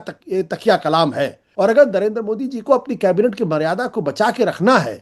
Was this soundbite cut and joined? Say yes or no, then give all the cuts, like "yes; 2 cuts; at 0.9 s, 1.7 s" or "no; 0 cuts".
yes; 1 cut; at 1.5 s